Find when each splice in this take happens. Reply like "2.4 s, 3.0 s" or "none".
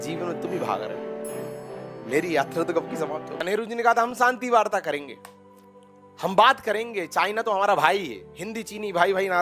3.4 s